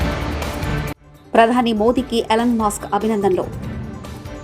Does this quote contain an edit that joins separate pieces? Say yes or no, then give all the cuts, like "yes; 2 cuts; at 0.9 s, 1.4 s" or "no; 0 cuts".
yes; 1 cut; at 1.0 s